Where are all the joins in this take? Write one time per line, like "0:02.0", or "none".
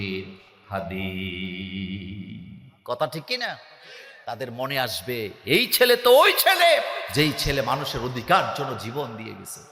none